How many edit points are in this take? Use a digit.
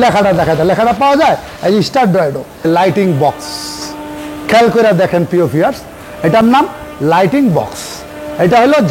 1